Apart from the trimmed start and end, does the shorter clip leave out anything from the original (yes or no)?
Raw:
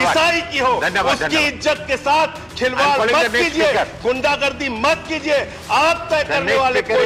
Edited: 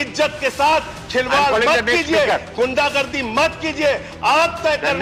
no